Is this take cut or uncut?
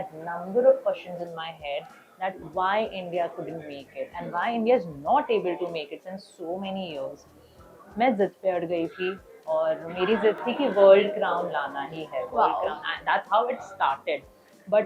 uncut